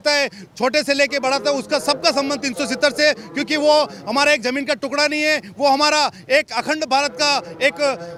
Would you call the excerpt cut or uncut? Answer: uncut